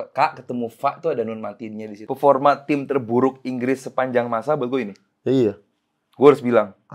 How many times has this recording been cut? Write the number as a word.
one